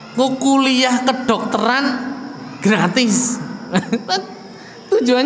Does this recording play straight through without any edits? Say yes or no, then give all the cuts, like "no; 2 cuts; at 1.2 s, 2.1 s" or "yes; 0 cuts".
yes; 0 cuts